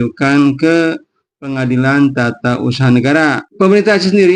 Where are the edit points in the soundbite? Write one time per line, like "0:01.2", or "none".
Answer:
0:03.4

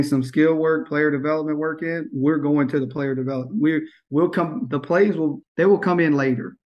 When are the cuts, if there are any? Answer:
0:05.4

